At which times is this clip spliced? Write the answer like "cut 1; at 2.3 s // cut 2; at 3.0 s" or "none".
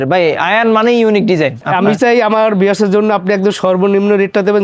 cut 1; at 1.6 s